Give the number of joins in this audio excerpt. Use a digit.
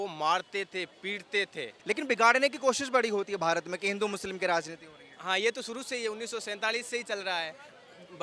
1